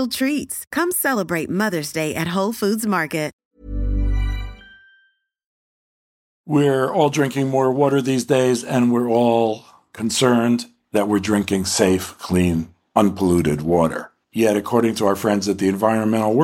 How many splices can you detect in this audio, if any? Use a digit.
1